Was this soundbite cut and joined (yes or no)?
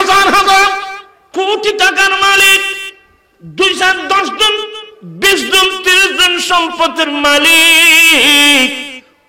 no